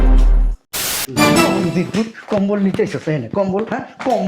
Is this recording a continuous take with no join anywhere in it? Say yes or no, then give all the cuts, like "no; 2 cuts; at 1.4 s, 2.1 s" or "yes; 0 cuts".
no; 1 cut; at 1.0 s